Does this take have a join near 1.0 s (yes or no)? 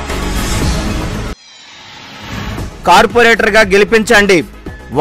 yes